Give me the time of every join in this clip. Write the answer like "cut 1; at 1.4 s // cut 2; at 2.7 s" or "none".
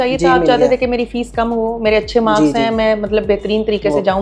none